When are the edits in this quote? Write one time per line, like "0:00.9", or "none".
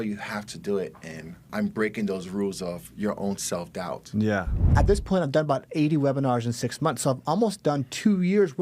0:01.5
0:04.7